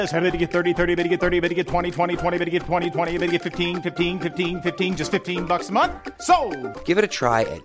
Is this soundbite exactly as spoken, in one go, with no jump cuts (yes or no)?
yes